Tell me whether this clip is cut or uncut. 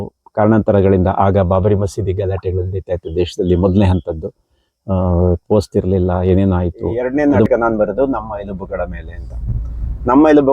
cut